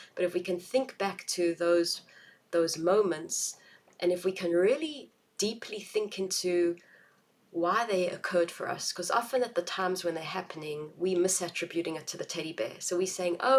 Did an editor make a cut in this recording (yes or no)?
no